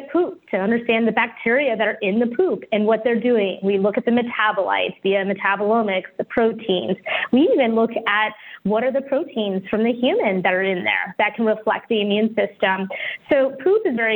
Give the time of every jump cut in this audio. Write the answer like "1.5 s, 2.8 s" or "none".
none